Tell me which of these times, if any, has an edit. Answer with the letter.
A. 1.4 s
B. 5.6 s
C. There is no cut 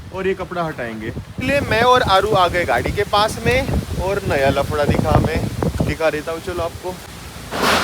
A